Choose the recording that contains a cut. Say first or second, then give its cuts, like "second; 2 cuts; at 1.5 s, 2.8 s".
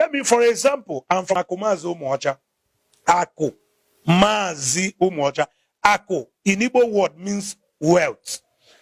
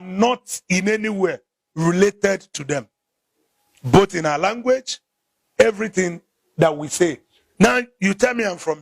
first; 1 cut; at 1.3 s